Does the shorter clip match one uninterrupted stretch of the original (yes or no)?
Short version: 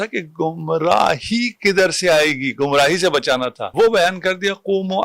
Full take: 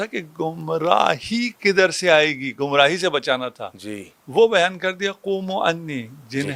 no